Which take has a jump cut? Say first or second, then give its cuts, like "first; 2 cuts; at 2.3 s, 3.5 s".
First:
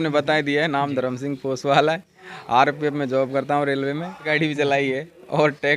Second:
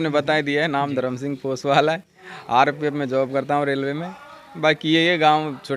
first; 1 cut; at 4.4 s